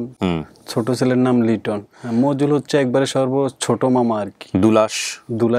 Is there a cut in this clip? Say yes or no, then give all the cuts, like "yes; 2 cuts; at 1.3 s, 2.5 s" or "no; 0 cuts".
yes; 1 cut; at 1.9 s